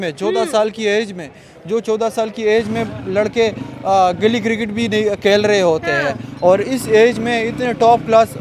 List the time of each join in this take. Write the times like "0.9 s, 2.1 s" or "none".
none

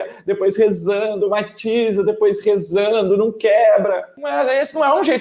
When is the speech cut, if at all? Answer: 4.2 s

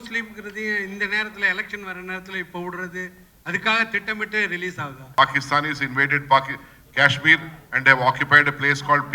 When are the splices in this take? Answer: 5.0 s

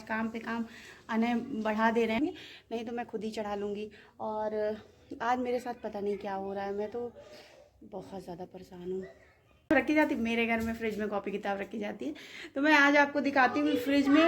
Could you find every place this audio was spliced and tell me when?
2.2 s, 9.7 s

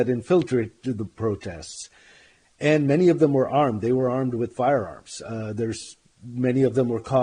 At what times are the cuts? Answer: none

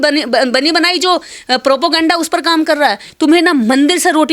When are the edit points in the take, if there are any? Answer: 3.1 s

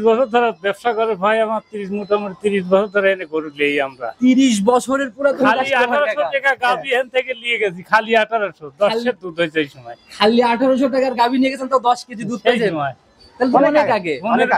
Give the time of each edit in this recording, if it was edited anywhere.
none

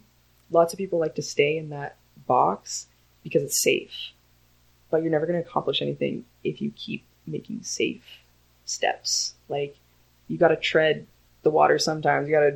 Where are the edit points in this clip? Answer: none

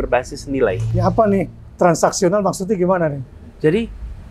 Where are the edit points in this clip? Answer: none

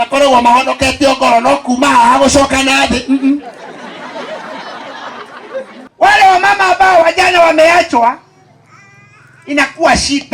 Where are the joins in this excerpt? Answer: 5.9 s

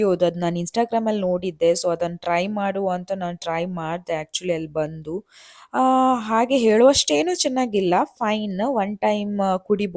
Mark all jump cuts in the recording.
none

